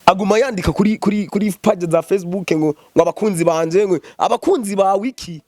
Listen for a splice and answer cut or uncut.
uncut